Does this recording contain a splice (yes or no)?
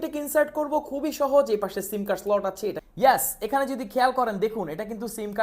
yes